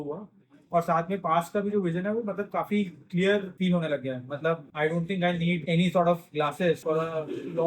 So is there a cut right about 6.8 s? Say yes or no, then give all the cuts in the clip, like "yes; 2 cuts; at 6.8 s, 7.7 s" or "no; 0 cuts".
yes; 4 cuts; at 3.5 s, 4.7 s, 5.6 s, 6.8 s